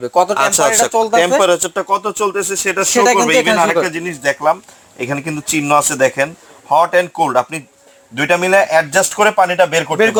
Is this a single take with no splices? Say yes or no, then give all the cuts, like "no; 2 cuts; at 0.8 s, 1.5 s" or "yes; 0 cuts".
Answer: yes; 0 cuts